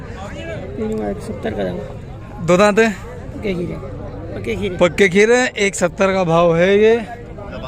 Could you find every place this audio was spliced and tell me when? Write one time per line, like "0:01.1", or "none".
none